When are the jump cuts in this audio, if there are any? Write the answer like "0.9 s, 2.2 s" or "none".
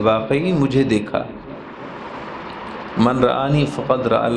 none